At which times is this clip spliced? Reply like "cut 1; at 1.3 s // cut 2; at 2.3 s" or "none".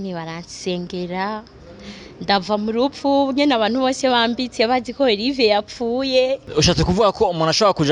cut 1; at 6.4 s